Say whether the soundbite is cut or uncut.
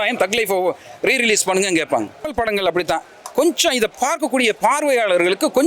cut